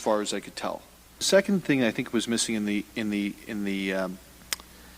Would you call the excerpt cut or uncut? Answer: cut